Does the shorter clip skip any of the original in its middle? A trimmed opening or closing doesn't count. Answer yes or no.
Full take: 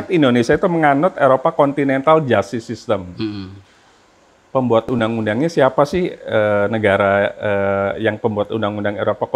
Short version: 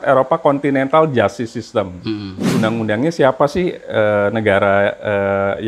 yes